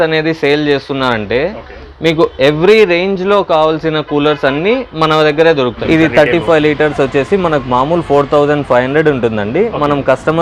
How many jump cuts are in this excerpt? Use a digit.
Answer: 1